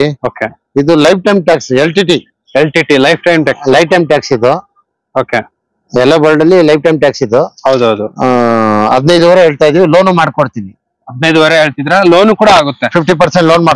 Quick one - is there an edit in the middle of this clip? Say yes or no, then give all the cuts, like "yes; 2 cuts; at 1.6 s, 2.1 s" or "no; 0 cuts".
no; 0 cuts